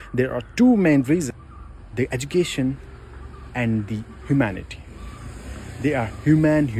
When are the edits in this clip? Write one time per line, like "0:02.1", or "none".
none